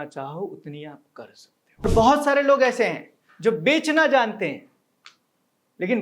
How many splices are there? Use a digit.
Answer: 1